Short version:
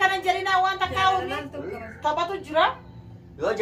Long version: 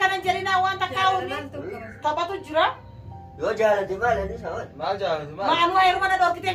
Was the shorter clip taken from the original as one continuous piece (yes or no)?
yes